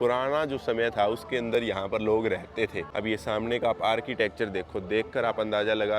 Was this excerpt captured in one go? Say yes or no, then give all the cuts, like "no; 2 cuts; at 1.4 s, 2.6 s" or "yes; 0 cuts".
no; 1 cut; at 2.8 s